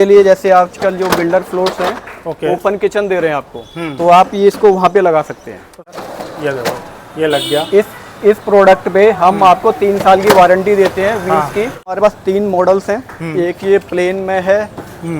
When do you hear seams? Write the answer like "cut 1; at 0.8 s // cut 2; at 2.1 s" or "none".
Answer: cut 1; at 5.9 s // cut 2; at 12.0 s